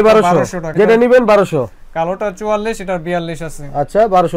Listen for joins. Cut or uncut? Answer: uncut